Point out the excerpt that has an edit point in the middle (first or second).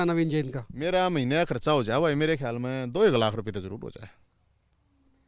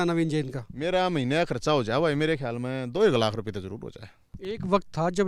second